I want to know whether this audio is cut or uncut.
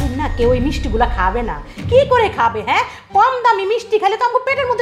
uncut